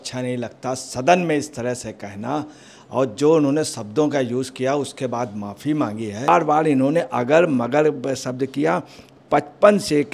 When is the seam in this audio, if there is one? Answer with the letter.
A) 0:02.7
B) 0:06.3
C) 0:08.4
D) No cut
B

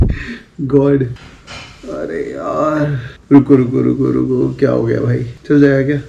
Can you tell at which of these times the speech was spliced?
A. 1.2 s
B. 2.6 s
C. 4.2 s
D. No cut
A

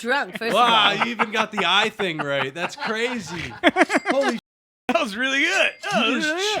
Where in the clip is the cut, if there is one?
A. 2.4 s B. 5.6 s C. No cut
C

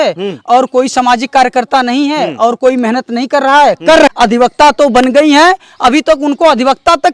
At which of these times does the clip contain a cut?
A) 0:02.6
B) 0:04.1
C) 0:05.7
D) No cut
B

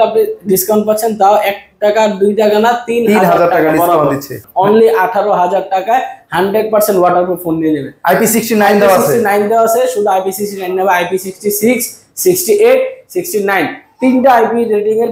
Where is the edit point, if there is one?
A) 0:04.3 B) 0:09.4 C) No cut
A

